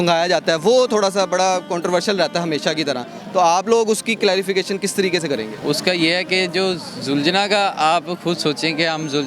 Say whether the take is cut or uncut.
uncut